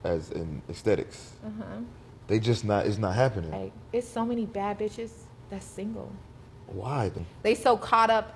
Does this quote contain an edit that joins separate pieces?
yes; 2 cuts; at 3.7 s, 7.3 s

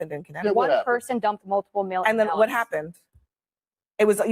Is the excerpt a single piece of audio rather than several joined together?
yes; 0 cuts

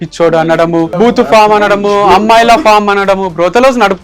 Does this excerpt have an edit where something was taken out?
yes; 1 cut; at 0.9 s

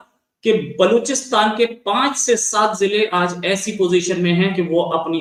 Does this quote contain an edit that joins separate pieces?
no; 0 cuts

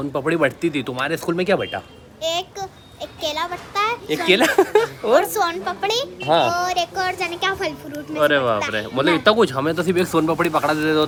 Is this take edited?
no; 0 cuts

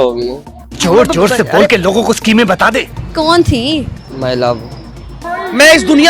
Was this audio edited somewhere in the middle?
yes; 2 cuts; at 3.0 s, 4.0 s

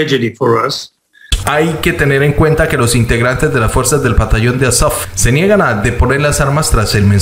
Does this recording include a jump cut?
yes; 1 cut; at 1.3 s

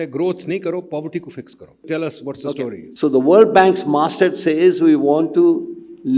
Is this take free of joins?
no; 2 cuts; at 1.8 s, 2.8 s

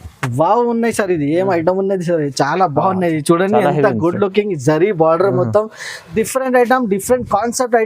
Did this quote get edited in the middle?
yes; 1 cut; at 6.1 s

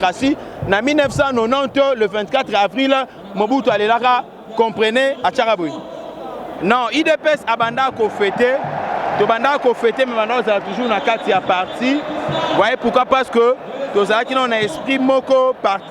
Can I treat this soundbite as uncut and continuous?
no; 1 cut; at 6.5 s

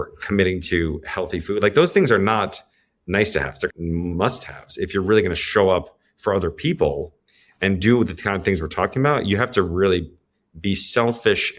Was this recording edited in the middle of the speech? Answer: yes; 1 cut; at 3.7 s

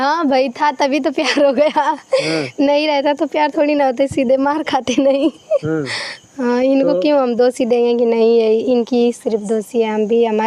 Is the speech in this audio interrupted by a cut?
no; 0 cuts

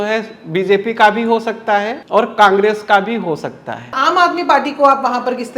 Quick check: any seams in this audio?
yes; 2 cuts; at 2.0 s, 4.0 s

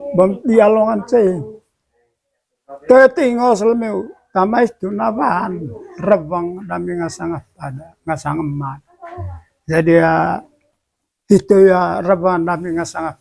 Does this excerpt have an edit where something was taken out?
no; 0 cuts

